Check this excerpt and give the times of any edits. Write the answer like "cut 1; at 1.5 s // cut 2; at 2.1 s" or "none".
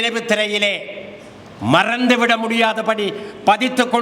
none

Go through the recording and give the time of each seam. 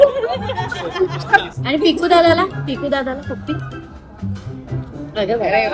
cut 1; at 1.6 s

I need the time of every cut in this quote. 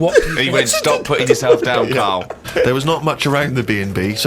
cut 1; at 2.4 s

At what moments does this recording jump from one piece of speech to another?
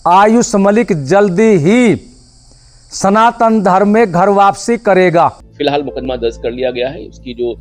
cut 1; at 5.5 s

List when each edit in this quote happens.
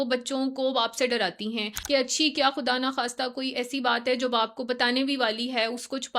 cut 1; at 1.7 s

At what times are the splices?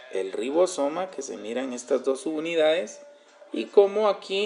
none

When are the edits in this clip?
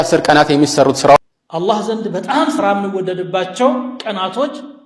cut 1; at 1.2 s

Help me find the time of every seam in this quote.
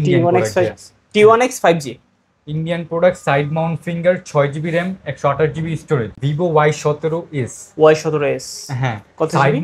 cut 1; at 6.2 s

